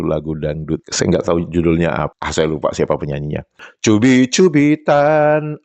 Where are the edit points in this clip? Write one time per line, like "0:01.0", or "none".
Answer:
0:02.2
0:03.6